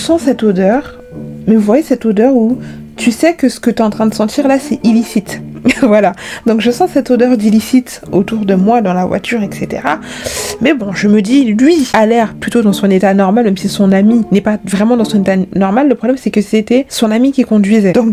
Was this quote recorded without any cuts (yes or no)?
yes